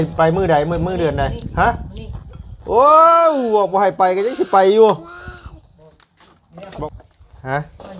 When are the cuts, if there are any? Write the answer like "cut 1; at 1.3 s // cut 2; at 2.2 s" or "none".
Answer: cut 1; at 6.6 s